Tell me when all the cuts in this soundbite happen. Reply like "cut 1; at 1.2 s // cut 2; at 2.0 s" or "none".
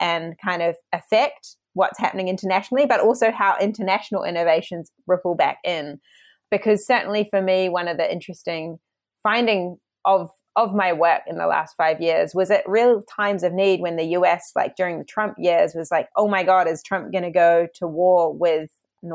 none